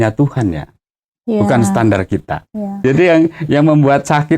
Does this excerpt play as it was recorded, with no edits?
no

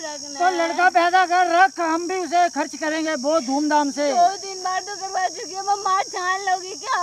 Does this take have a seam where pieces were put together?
no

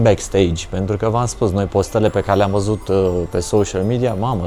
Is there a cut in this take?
no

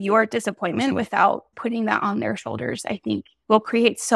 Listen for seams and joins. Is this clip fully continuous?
no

